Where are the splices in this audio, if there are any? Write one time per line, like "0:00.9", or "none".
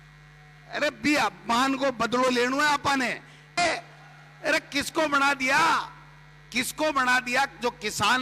0:03.6